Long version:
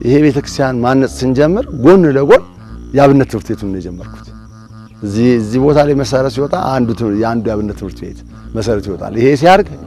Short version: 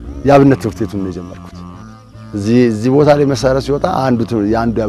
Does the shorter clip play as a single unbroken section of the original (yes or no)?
yes